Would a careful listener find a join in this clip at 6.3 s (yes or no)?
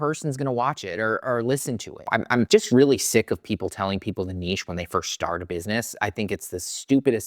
no